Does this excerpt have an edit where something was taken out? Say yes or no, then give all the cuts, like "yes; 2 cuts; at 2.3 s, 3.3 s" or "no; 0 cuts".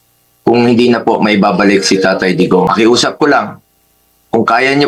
yes; 1 cut; at 2.7 s